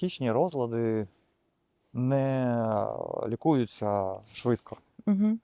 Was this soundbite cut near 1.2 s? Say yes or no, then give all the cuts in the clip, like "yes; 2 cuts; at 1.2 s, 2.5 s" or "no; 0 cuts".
no; 0 cuts